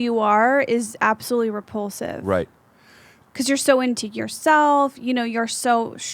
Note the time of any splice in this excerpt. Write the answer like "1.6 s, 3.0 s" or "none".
3.2 s